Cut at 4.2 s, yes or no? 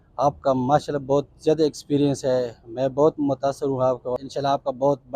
yes